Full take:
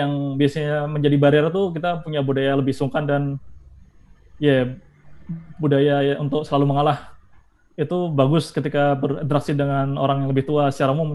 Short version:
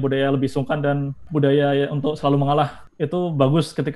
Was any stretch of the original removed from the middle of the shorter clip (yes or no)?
yes